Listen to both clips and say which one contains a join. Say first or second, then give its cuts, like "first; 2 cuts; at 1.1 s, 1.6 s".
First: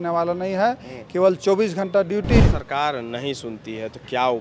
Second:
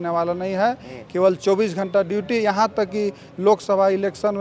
first; 1 cut; at 2.4 s